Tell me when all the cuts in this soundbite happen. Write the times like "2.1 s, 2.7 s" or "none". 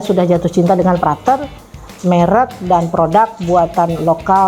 1.0 s